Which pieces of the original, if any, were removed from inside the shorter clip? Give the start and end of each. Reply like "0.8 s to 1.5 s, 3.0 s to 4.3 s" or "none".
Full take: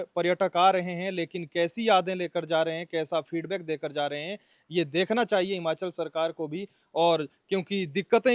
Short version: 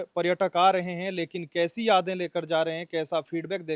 none